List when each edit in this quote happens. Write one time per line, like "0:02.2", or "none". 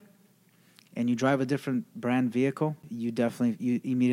0:02.9